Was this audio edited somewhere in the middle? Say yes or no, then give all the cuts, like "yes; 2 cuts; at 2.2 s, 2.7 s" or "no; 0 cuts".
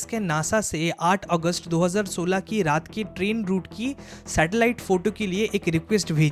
no; 0 cuts